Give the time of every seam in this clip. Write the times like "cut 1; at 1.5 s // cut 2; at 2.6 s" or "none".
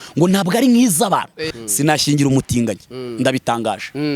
cut 1; at 1.5 s